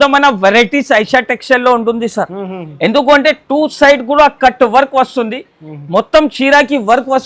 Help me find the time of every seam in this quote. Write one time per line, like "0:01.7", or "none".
none